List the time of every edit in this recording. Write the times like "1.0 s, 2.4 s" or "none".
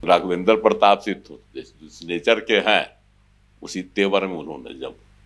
none